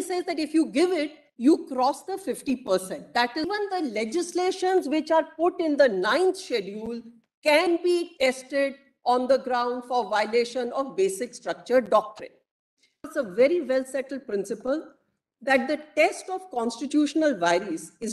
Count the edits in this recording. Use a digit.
2